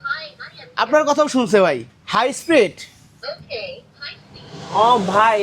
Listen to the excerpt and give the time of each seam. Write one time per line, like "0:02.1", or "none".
0:01.8